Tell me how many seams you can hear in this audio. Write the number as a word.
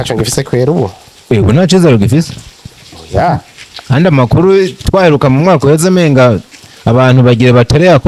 zero